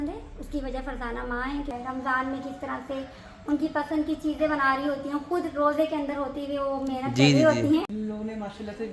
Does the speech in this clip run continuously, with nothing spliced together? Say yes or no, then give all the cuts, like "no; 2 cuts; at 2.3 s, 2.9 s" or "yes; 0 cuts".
no; 2 cuts; at 1.7 s, 7.9 s